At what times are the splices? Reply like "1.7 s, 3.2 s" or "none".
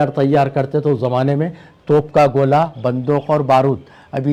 none